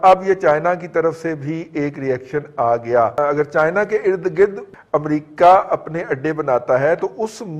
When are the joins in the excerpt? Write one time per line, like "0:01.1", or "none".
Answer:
0:03.2
0:04.6

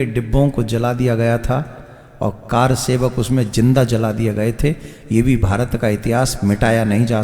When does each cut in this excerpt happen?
none

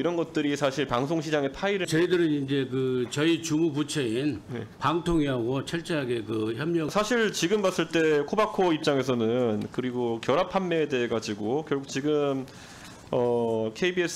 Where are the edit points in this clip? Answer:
0:01.9
0:06.9

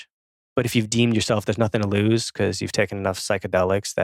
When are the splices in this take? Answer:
none

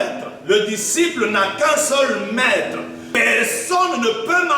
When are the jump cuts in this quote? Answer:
0:03.1

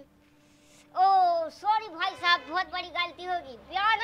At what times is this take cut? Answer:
none

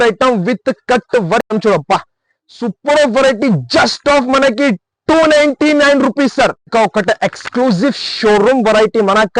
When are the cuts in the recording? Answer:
0:01.5
0:06.6

